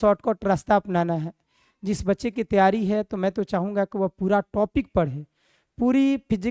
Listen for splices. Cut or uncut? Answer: uncut